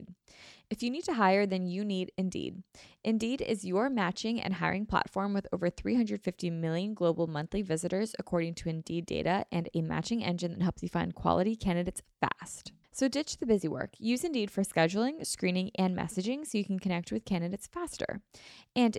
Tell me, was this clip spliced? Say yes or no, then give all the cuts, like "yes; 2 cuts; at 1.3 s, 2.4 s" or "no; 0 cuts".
no; 0 cuts